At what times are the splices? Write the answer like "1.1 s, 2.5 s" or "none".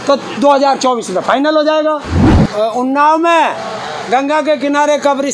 2.2 s